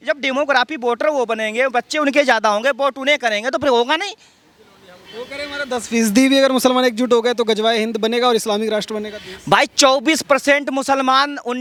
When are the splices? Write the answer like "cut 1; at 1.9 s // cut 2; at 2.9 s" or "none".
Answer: none